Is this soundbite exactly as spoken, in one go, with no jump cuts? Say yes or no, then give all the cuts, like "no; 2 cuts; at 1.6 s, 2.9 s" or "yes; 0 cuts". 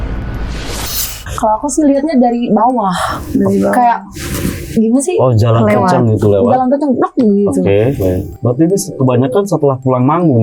no; 1 cut; at 1.0 s